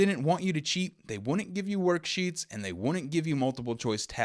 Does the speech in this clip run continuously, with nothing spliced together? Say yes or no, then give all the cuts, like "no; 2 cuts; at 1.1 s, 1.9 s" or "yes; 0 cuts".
yes; 0 cuts